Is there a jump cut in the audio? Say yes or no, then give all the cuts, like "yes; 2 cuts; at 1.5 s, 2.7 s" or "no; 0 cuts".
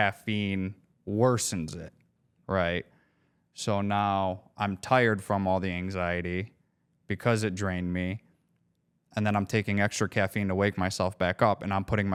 no; 0 cuts